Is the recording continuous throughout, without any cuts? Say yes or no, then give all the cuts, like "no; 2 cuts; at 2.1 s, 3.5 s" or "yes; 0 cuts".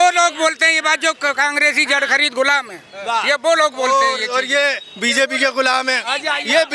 yes; 0 cuts